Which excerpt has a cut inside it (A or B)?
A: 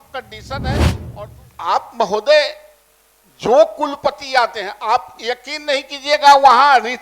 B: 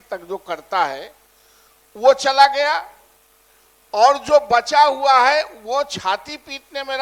A